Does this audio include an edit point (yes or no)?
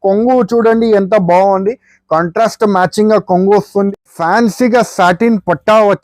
yes